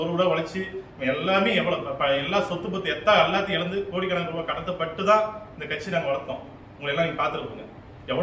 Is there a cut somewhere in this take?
no; 0 cuts

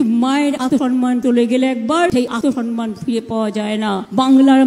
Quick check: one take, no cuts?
no; 2 cuts; at 0.9 s, 2.5 s

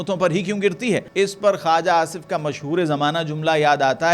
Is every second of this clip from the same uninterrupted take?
no; 1 cut; at 1.1 s

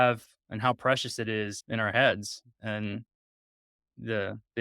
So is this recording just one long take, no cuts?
no; 2 cuts; at 1.6 s, 2.5 s

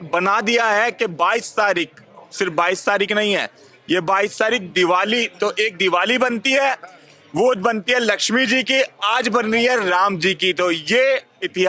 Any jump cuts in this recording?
no; 0 cuts

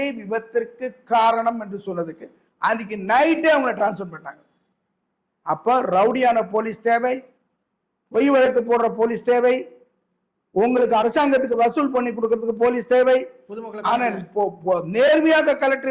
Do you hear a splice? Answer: no; 0 cuts

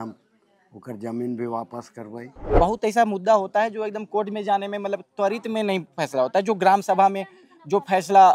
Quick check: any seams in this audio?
yes; 1 cut; at 2.5 s

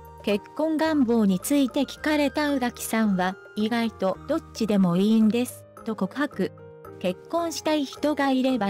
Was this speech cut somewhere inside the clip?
no; 0 cuts

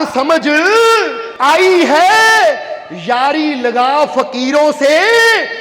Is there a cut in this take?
yes; 1 cut; at 1.2 s

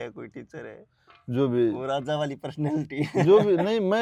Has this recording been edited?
no; 0 cuts

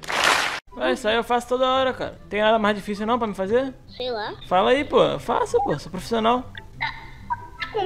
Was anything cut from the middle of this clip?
yes; 1 cut; at 2.2 s

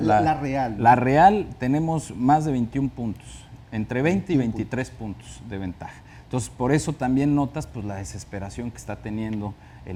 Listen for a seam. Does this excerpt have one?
no; 0 cuts

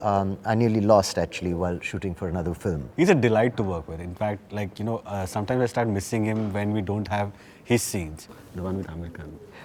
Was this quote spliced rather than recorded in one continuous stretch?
yes; 2 cuts; at 2.8 s, 8.4 s

